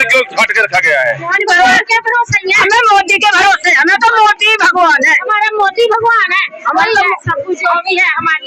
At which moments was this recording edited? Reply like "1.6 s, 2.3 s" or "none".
1.4 s